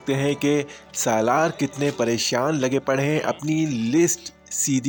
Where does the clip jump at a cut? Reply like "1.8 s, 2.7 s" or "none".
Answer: none